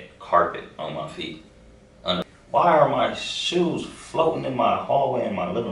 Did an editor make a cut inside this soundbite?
yes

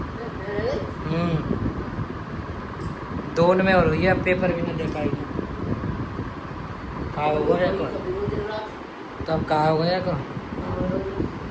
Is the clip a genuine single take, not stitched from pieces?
yes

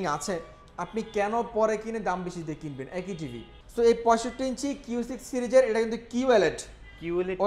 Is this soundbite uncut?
no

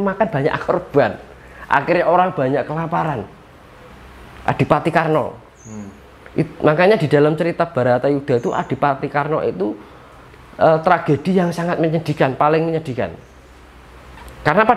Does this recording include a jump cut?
no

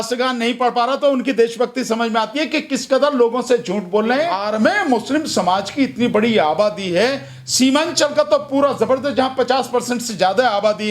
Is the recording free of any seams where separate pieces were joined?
no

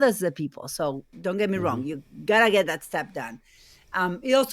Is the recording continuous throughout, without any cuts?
no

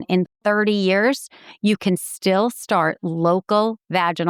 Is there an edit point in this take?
no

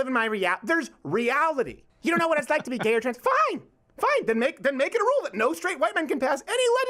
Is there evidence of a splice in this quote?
yes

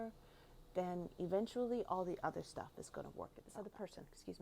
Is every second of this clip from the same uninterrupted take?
no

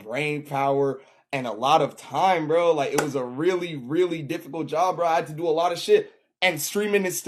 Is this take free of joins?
yes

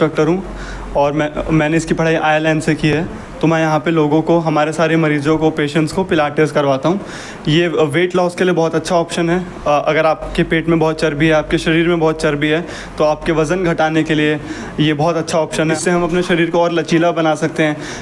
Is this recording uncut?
yes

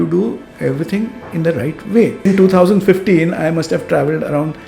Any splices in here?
yes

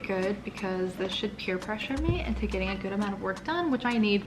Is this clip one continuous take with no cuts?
yes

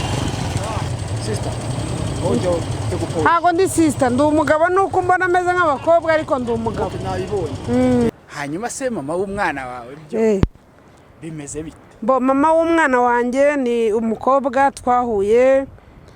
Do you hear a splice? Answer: yes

